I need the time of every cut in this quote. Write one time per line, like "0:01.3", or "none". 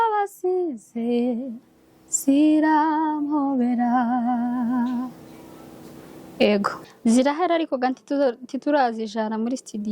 0:06.9